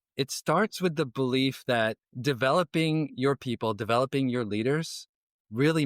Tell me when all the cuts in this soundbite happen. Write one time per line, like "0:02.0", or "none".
0:02.1